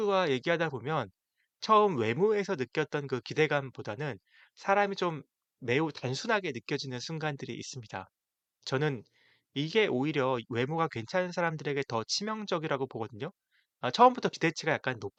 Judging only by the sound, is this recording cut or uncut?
uncut